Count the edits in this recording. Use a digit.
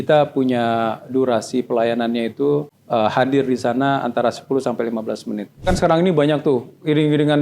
2